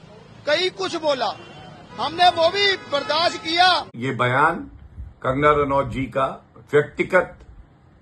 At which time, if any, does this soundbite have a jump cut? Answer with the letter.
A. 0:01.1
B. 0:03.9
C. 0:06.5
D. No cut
B